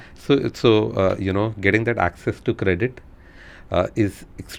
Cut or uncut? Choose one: uncut